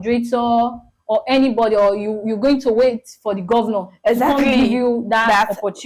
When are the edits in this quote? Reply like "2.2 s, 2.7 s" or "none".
none